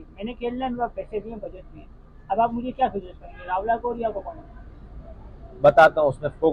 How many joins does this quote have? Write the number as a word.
zero